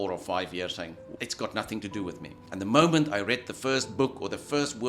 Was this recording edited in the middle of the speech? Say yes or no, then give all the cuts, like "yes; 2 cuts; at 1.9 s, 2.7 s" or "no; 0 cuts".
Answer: yes; 2 cuts; at 1.1 s, 2.4 s